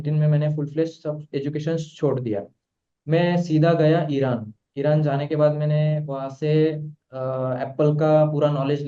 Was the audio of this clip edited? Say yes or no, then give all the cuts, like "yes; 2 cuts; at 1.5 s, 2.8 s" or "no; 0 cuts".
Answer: no; 0 cuts